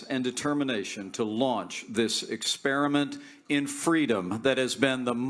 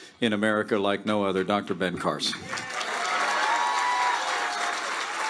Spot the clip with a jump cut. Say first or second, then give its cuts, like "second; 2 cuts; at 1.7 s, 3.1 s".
second; 1 cut; at 2.9 s